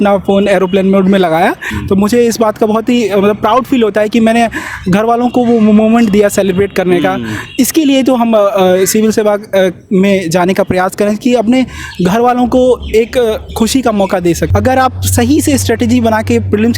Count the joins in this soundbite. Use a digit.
2